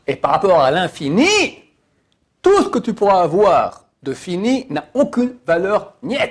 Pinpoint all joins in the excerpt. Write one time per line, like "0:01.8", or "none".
none